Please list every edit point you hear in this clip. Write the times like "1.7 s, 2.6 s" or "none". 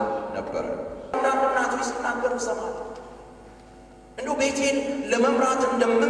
1.1 s